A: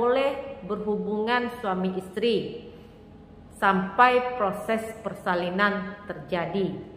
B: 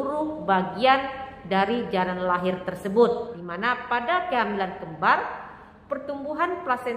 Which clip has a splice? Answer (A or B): B